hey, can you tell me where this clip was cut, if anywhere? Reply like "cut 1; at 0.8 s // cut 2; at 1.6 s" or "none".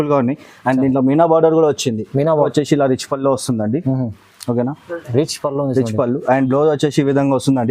cut 1; at 2.5 s